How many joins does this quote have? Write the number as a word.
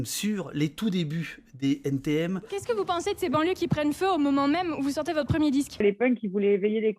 two